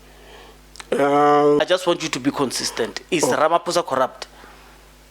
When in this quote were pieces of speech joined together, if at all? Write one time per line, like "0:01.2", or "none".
0:01.6